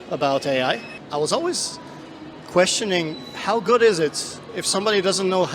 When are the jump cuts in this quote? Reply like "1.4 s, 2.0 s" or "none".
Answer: 0.9 s